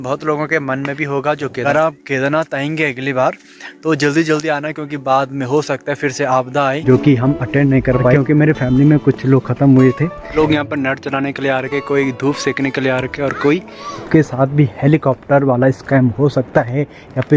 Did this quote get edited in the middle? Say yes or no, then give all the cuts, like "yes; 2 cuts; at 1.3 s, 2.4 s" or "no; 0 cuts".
yes; 4 cuts; at 1.6 s, 6.8 s, 10.3 s, 14.0 s